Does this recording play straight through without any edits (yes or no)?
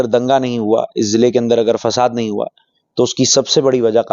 yes